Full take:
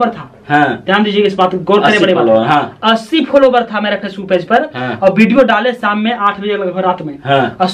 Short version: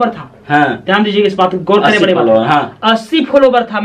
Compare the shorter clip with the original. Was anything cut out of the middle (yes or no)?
no